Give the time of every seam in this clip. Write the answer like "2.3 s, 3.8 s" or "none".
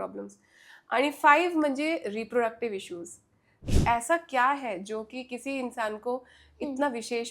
3.6 s